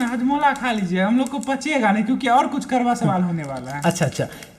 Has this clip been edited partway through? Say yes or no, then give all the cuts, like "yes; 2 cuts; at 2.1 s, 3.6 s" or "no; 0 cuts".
no; 0 cuts